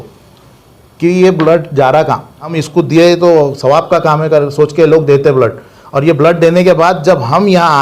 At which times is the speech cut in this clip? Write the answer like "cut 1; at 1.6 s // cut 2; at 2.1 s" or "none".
cut 1; at 2.5 s

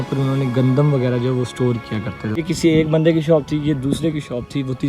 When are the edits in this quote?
cut 1; at 2.4 s

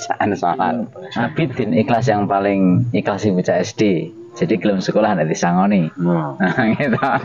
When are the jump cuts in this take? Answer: cut 1; at 1.0 s

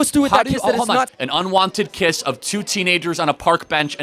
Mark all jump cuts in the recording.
cut 1; at 1.1 s

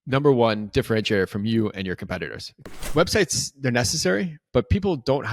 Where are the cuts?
cut 1; at 2.6 s

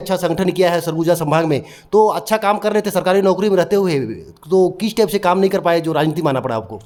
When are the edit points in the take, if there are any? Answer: none

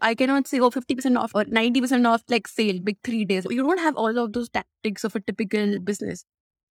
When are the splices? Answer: cut 1; at 3.5 s

